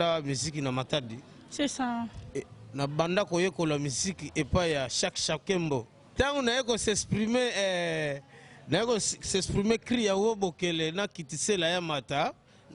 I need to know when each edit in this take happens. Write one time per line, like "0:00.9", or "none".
0:06.0